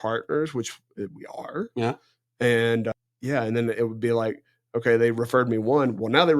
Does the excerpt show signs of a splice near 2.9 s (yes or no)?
yes